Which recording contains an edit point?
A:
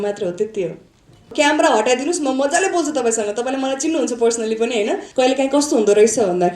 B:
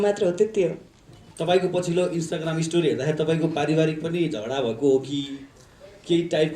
A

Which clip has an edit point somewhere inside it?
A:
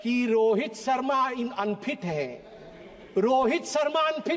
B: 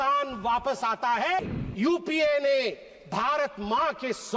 B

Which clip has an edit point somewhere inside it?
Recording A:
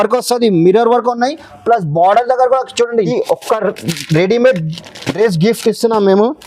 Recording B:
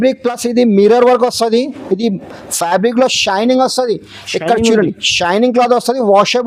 A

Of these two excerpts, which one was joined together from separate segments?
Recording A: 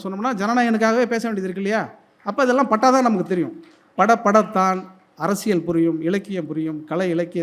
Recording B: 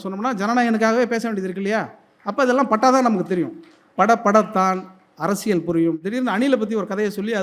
B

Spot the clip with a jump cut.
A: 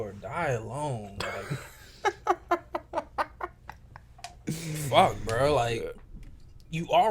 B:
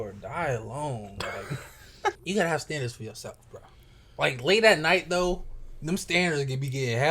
B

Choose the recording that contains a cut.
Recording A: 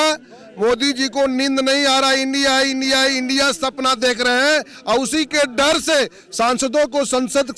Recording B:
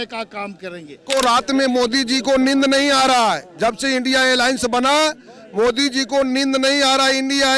B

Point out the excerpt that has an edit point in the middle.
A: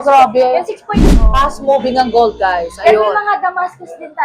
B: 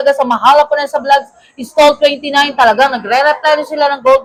A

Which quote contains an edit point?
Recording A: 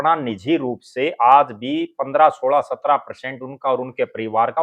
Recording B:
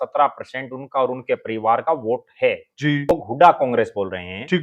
B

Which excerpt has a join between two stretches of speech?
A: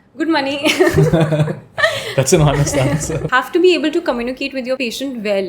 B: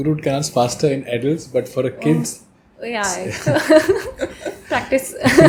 A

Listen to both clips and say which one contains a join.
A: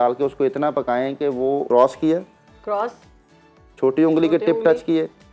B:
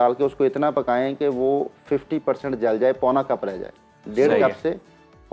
A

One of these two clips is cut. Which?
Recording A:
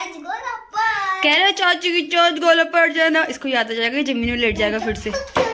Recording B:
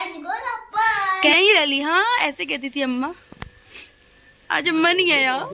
B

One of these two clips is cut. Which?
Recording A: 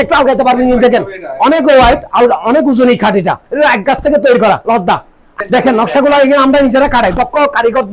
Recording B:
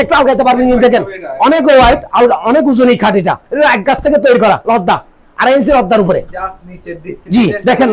A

